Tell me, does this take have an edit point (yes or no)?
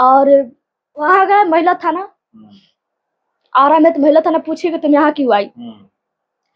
yes